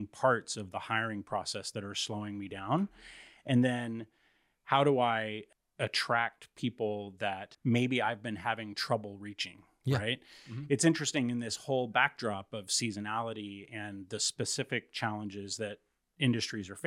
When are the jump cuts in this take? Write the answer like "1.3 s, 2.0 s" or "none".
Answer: 7.5 s